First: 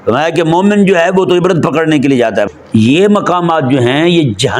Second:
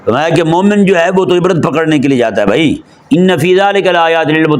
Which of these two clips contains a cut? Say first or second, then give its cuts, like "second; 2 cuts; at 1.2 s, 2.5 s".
first; 1 cut; at 2.4 s